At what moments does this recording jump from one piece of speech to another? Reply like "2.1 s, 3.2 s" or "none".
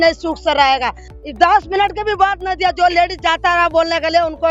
1.1 s